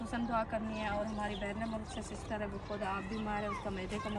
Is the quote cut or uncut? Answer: uncut